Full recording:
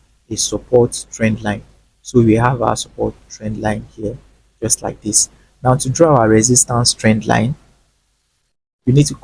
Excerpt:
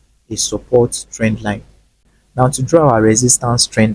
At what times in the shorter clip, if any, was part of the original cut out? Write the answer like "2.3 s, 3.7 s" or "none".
2.0 s